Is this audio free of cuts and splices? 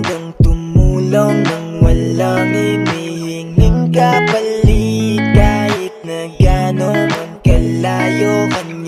yes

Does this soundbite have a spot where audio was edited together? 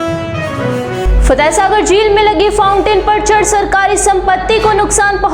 no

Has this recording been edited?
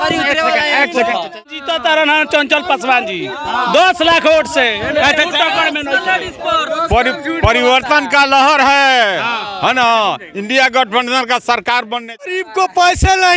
yes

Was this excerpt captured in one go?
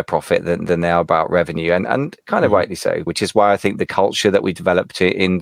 no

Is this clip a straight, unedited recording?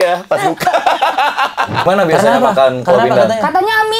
no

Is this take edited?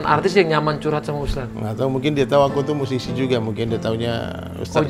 no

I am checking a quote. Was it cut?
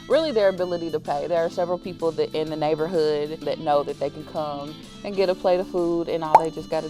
yes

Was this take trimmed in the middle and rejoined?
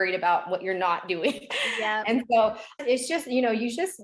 yes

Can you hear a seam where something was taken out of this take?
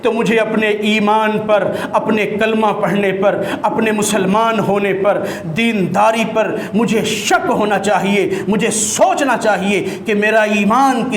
no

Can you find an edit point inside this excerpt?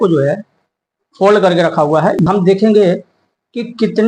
yes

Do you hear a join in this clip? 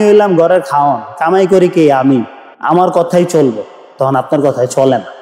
no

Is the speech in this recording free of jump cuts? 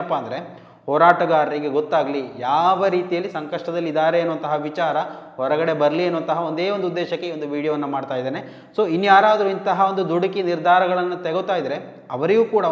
yes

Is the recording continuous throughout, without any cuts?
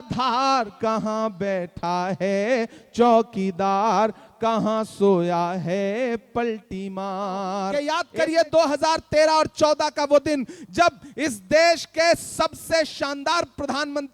no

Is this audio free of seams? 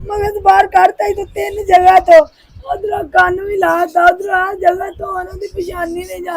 yes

